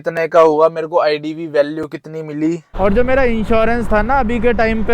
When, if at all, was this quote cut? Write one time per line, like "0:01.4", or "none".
0:02.7